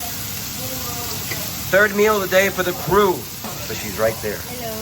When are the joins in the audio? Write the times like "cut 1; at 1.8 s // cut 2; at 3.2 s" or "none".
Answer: cut 1; at 3.5 s